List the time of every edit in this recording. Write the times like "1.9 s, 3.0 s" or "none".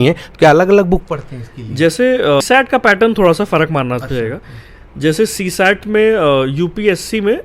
2.5 s